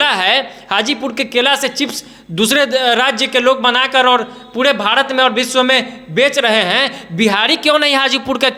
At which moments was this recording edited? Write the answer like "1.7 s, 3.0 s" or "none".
none